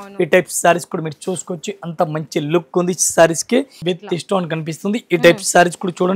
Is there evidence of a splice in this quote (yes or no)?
yes